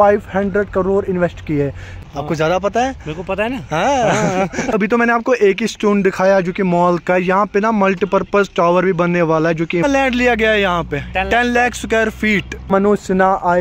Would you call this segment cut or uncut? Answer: cut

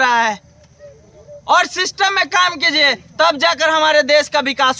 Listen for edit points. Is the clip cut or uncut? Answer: uncut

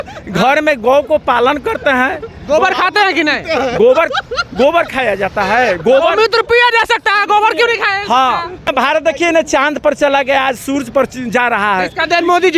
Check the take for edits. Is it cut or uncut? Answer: cut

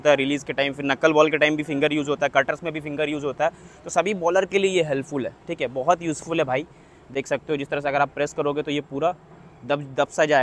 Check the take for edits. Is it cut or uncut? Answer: uncut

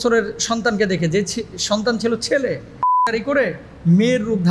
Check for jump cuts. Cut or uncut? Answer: cut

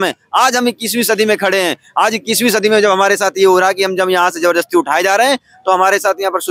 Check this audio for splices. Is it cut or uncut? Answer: uncut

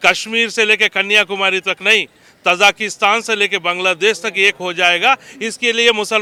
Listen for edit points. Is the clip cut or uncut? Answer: uncut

